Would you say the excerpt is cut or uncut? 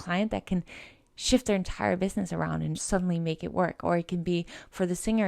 uncut